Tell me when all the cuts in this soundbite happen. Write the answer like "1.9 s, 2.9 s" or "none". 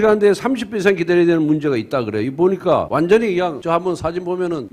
2.9 s, 3.6 s